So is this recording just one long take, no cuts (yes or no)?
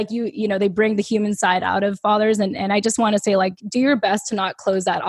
no